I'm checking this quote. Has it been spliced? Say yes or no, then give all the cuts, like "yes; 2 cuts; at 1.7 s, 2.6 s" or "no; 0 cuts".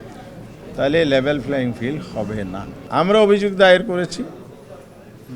yes; 1 cut; at 2.7 s